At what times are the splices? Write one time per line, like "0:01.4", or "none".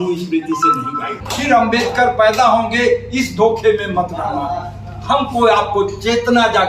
0:01.2

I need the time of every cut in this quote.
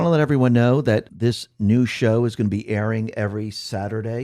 0:01.1

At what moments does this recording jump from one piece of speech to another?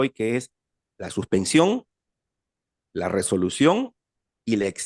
none

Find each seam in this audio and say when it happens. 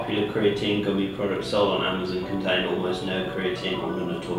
none

